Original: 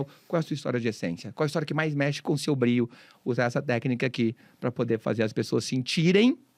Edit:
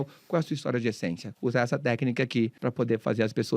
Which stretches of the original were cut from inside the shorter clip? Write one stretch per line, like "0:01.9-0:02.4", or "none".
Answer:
0:01.2-0:03.1
0:04.4-0:04.6